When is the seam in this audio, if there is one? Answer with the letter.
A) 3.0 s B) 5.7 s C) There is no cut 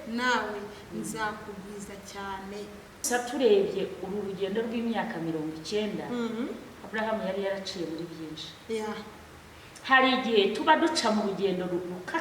A